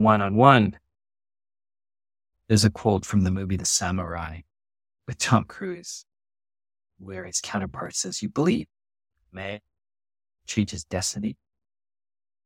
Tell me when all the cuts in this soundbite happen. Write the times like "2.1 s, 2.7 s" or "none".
2.1 s